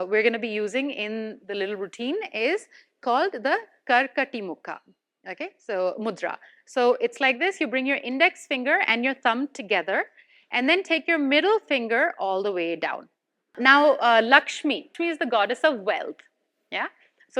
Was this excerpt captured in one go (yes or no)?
no